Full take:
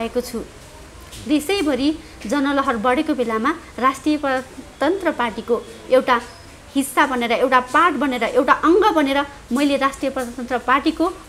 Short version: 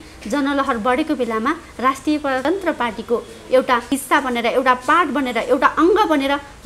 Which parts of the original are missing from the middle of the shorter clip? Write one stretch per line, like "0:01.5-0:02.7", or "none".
0:04.4-0:04.8
0:06.2-0:06.7